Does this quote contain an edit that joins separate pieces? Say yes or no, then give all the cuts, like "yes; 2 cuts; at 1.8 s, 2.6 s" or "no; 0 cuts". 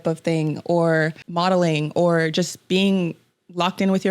yes; 1 cut; at 1.2 s